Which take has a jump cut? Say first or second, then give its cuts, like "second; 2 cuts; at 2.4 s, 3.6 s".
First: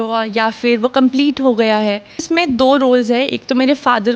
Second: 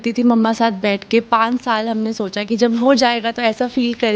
first; 1 cut; at 2.2 s